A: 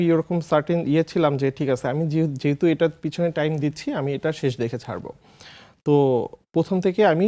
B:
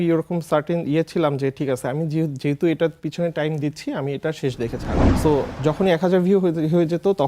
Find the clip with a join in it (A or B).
B